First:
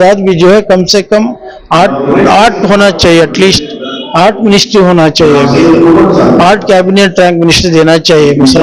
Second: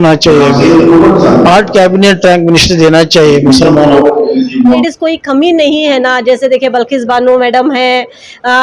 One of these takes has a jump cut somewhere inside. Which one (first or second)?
second